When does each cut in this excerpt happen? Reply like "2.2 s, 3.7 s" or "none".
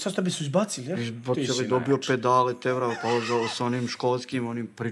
none